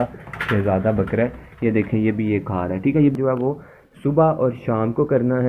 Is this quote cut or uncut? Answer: cut